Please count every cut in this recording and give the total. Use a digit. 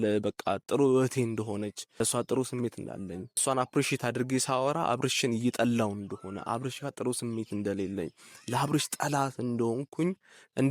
2